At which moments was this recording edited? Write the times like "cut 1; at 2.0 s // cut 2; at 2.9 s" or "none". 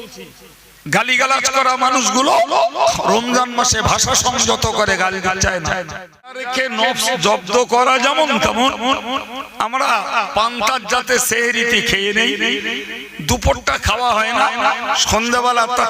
cut 1; at 6.5 s